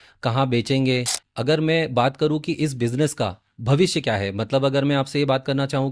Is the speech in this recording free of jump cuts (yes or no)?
no